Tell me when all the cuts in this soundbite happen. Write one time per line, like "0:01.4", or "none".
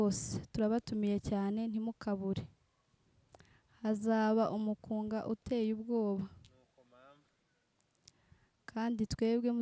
none